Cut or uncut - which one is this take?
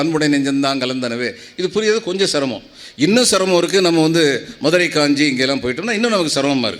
uncut